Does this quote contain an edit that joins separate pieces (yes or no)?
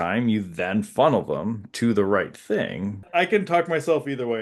yes